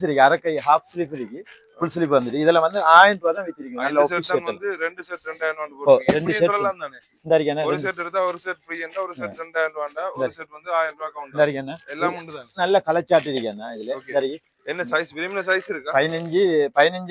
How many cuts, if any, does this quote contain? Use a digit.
0